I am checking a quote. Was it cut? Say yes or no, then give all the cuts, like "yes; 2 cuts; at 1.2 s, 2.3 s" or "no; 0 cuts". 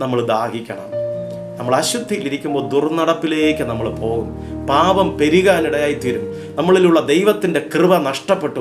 no; 0 cuts